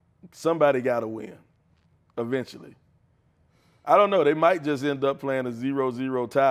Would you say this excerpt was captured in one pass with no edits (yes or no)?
yes